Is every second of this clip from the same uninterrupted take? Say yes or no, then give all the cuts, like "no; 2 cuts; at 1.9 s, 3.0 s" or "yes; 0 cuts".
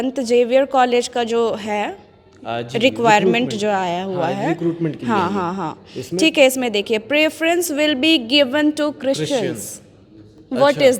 yes; 0 cuts